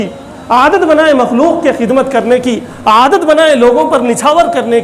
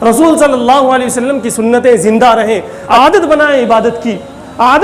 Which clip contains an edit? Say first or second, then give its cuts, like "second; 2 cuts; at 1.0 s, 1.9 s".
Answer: second; 1 cut; at 2.8 s